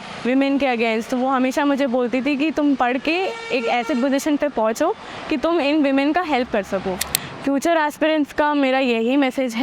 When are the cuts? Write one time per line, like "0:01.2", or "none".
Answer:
0:07.1